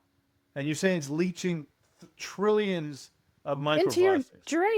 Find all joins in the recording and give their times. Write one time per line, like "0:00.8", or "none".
none